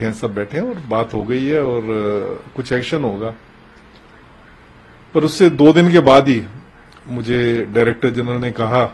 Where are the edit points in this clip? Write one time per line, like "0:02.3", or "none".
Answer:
none